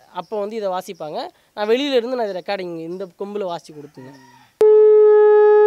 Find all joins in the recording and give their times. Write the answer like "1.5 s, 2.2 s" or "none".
4.6 s